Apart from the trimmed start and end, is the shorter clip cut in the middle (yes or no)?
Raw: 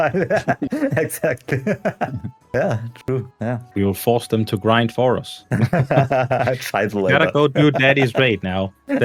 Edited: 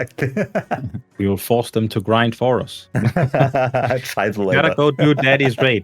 yes